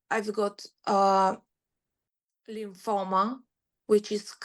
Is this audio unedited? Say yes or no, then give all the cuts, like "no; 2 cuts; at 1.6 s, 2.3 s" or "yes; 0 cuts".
no; 1 cut; at 2.6 s